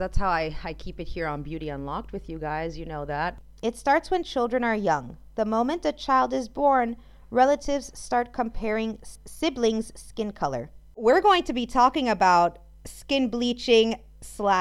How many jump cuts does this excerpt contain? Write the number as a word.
three